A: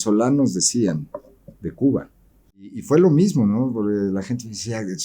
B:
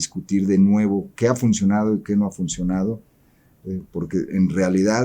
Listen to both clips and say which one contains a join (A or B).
A